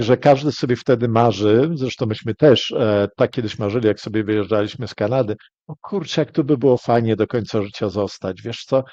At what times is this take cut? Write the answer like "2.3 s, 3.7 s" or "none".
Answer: none